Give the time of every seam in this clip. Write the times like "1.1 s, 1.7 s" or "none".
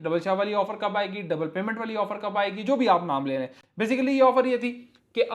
none